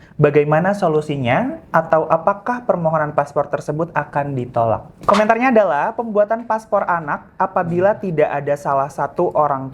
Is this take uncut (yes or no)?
no